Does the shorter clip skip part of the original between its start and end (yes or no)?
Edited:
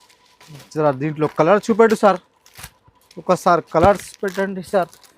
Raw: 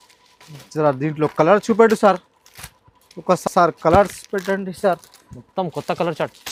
yes